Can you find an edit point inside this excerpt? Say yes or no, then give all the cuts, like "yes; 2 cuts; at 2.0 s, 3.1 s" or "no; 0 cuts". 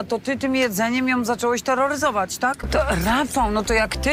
yes; 1 cut; at 2.6 s